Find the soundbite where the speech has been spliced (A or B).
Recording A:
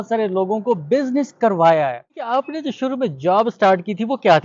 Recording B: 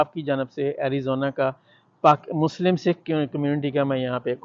A